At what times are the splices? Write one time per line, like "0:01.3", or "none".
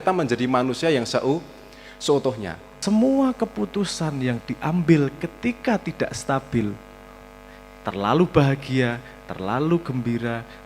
0:02.6